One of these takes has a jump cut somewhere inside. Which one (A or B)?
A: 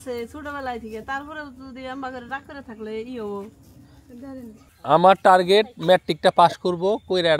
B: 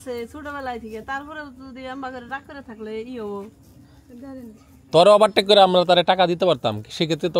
A